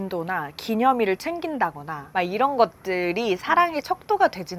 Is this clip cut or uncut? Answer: uncut